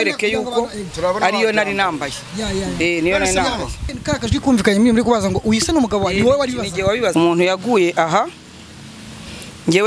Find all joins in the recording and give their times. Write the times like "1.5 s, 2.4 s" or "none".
3.9 s, 7.1 s